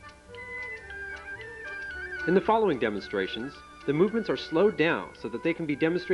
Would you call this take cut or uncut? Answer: cut